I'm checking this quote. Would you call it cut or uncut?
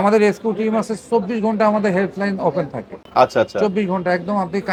uncut